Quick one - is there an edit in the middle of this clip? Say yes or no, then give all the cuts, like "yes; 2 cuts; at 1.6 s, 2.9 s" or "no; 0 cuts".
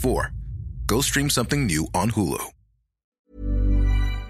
yes; 1 cut; at 3.3 s